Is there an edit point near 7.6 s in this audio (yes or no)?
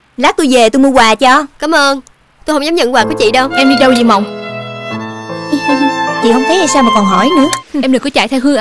yes